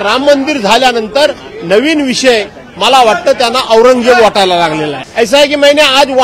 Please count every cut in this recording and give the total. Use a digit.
1